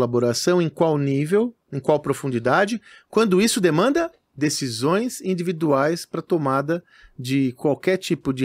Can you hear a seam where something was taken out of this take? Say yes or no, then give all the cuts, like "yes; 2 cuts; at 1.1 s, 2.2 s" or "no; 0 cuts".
no; 0 cuts